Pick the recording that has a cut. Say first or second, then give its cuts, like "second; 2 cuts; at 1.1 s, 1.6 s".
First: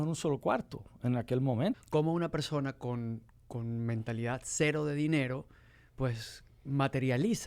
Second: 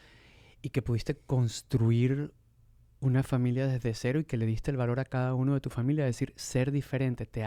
first; 1 cut; at 1.8 s